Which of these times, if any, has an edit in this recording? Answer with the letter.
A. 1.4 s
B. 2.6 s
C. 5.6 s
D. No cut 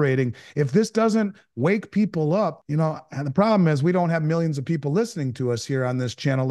B